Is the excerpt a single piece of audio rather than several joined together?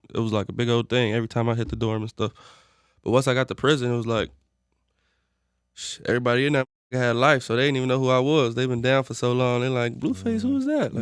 yes; 0 cuts

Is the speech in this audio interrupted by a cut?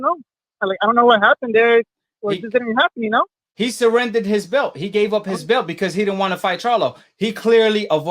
yes; 1 cut; at 3.5 s

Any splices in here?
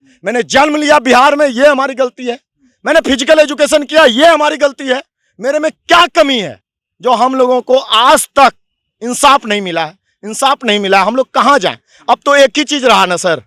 no; 0 cuts

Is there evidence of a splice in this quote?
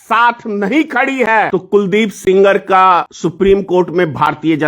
yes; 2 cuts; at 1.5 s, 3.1 s

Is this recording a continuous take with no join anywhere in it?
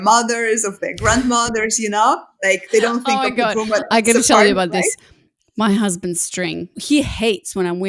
no; 1 cut; at 6.7 s

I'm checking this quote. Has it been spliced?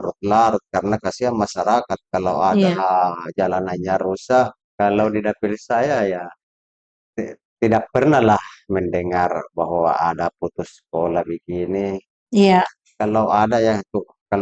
yes; 1 cut; at 4.6 s

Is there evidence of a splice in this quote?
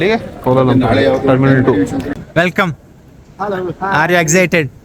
yes; 1 cut; at 2.2 s

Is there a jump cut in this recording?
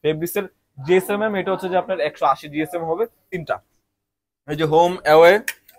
yes; 1 cut; at 3.3 s

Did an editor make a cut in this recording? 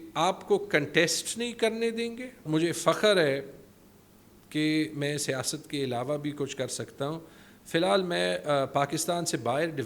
yes; 1 cut; at 2.4 s

